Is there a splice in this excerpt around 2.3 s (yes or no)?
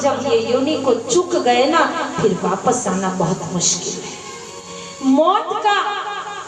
no